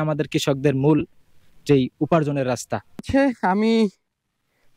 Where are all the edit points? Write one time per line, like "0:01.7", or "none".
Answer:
none